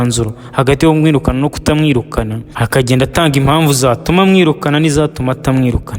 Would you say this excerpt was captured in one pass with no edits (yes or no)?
no